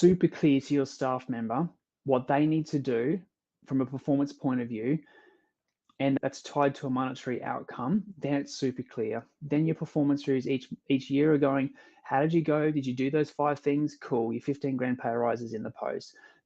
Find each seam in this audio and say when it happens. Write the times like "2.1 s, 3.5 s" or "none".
6.2 s